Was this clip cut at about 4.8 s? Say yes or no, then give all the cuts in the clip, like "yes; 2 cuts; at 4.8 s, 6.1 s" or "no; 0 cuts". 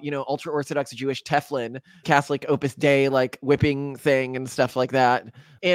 no; 1 cut; at 2.0 s